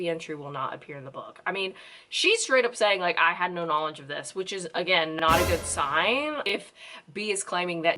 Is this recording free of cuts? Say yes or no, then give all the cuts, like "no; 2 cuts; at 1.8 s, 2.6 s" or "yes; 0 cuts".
no; 1 cut; at 6.4 s